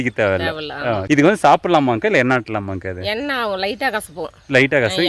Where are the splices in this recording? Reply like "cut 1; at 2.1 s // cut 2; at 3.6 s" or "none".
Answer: cut 1; at 1.0 s